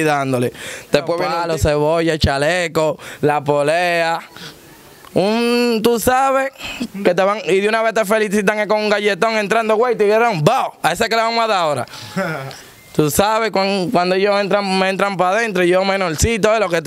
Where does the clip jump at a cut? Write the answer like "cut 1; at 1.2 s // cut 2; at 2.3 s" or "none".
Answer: cut 1; at 1.3 s